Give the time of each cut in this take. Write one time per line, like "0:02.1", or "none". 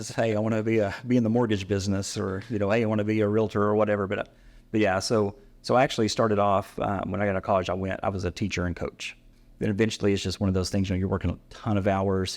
0:09.2